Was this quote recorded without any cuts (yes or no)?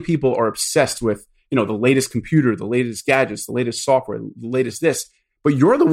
yes